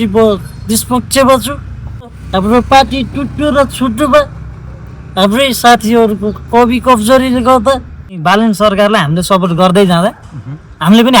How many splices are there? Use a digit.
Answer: 2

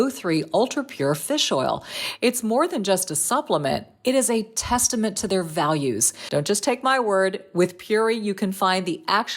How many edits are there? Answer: 1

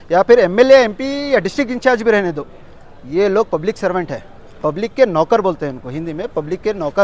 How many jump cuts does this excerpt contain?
0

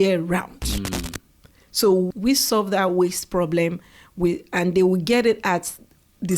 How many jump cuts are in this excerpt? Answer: 1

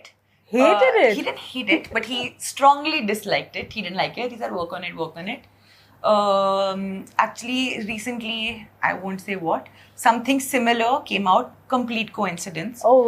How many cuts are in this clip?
0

